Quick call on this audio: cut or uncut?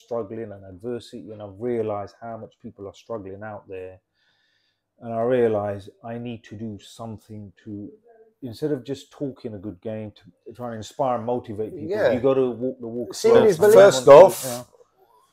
cut